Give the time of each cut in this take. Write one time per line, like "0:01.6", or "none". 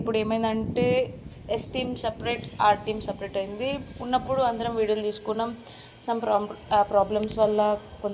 none